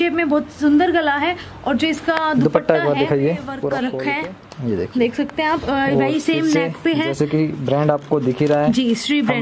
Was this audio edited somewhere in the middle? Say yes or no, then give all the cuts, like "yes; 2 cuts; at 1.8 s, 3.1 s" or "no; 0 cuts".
yes; 1 cut; at 3.9 s